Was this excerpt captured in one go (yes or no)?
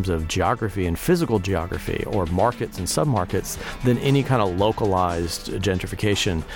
yes